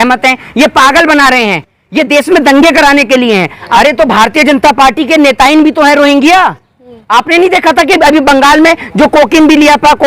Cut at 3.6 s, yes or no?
yes